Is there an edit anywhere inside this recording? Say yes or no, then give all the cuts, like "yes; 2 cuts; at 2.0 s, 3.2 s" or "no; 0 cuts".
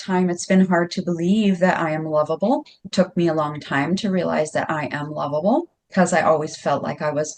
no; 0 cuts